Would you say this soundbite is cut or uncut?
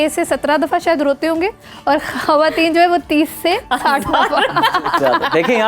uncut